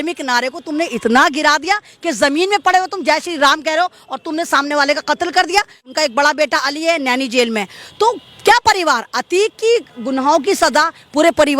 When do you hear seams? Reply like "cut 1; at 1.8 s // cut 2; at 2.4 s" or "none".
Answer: cut 1; at 5.8 s